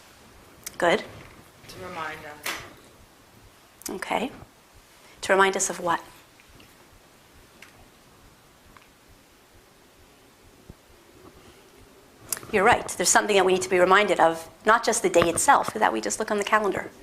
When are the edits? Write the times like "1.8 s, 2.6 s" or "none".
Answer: 9.8 s